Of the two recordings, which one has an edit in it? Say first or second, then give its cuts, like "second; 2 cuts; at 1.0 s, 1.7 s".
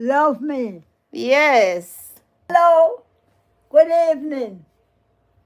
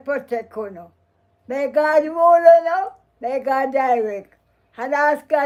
first; 1 cut; at 2.5 s